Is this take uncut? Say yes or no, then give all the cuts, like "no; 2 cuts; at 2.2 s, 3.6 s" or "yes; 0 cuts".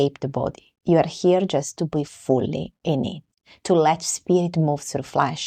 yes; 0 cuts